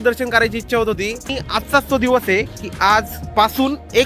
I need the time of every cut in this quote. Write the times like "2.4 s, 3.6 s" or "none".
1.2 s

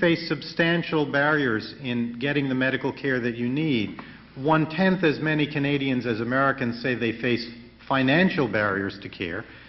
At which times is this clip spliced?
none

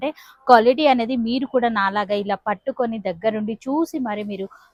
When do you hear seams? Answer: none

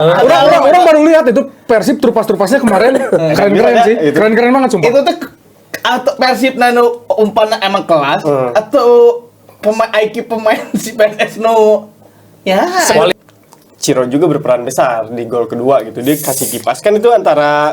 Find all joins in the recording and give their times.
13.1 s

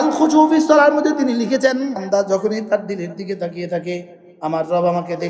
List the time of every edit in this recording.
2.0 s

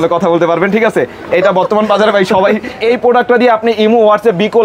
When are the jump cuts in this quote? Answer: 2.8 s

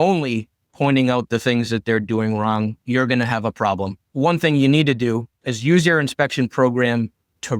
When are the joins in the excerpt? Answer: 4.0 s

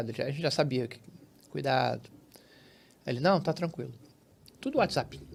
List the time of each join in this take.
none

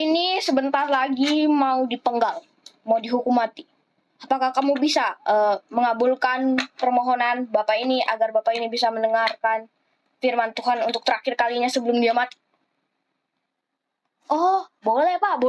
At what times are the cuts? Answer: none

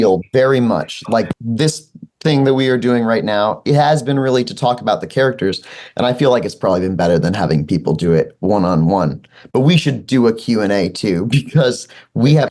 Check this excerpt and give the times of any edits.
1.3 s

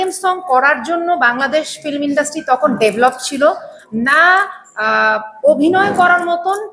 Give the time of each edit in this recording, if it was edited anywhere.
none

